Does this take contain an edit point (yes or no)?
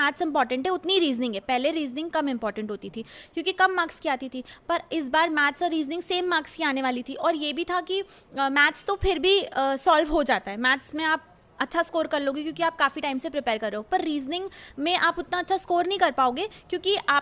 no